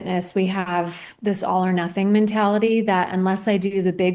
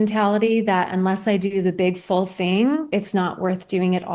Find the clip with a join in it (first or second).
second